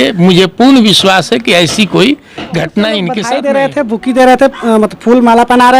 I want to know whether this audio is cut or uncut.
cut